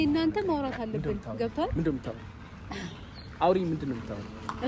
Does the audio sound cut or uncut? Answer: uncut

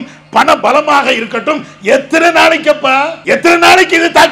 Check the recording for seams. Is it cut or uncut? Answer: cut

